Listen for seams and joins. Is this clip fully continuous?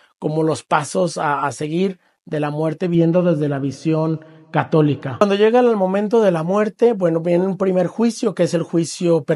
no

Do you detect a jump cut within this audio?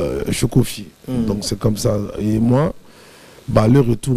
no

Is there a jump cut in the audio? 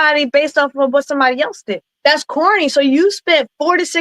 yes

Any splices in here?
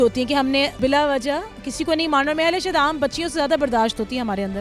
no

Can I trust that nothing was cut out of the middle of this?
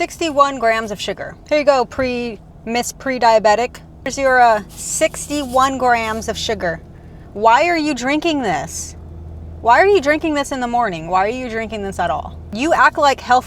no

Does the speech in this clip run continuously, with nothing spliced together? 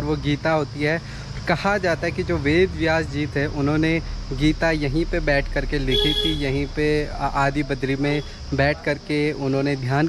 yes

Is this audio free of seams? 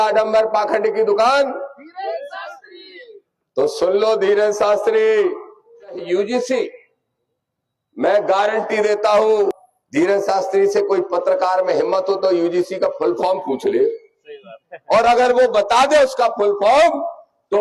no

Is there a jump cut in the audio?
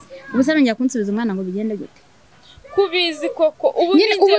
no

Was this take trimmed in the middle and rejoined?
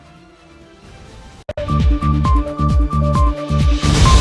yes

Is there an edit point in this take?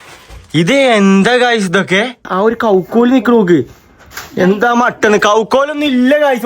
yes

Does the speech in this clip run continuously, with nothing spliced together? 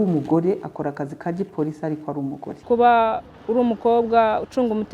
no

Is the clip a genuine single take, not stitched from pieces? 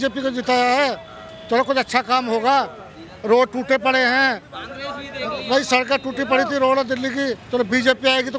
yes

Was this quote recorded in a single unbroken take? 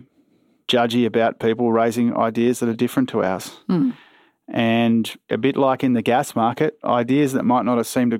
yes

